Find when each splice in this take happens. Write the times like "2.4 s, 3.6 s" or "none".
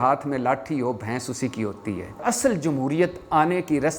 2.2 s